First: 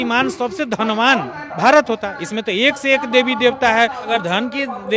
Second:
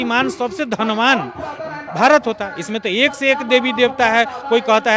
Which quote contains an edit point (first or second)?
first